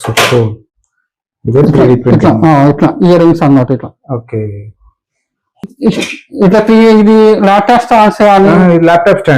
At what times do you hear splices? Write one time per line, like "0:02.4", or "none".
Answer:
0:05.6